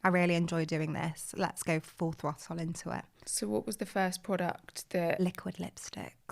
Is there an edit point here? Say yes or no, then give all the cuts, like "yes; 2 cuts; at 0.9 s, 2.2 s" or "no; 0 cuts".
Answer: no; 0 cuts